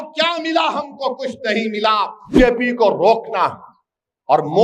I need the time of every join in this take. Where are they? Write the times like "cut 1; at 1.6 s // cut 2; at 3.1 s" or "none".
cut 1; at 2.3 s